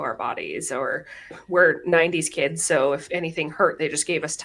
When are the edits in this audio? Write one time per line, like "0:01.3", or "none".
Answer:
0:01.4